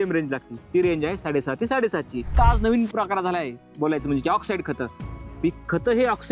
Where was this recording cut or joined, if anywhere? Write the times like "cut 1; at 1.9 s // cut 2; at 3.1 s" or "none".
cut 1; at 2.3 s